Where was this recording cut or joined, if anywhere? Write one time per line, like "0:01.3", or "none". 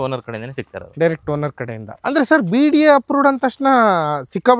0:01.9